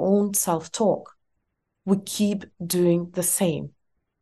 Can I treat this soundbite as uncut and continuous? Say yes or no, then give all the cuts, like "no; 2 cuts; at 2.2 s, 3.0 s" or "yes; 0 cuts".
yes; 0 cuts